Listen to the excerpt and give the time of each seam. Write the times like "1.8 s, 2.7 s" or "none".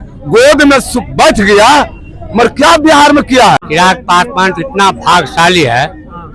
3.6 s